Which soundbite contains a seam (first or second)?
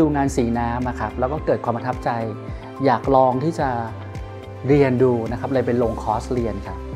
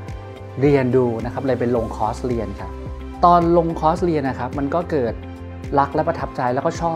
second